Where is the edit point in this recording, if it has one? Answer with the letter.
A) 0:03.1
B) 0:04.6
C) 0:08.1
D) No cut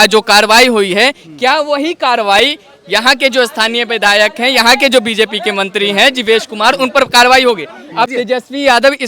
C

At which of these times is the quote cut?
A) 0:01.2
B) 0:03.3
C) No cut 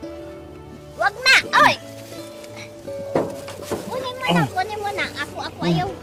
C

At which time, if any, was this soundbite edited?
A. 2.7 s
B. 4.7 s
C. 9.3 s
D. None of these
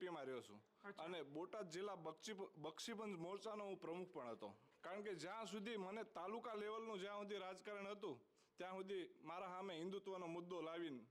B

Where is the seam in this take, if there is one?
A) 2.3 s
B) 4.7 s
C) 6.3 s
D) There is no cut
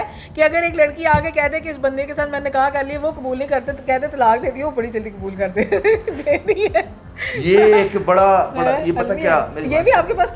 D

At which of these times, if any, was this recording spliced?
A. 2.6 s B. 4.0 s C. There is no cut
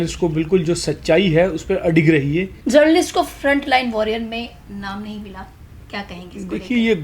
A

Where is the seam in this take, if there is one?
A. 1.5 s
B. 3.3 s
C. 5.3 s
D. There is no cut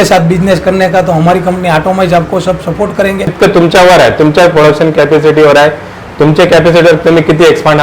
B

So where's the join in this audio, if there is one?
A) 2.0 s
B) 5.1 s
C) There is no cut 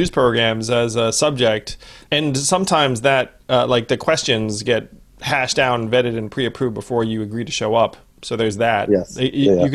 A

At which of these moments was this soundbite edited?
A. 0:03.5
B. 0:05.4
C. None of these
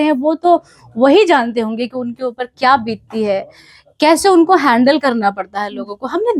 C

